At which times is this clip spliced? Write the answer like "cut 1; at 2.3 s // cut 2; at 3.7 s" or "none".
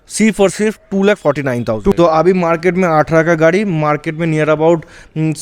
cut 1; at 1.9 s